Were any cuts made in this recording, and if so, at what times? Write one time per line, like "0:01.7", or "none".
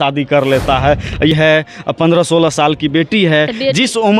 0:01.3